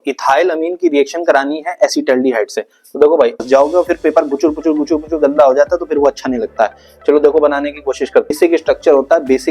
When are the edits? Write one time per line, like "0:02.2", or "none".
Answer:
0:03.4
0:08.4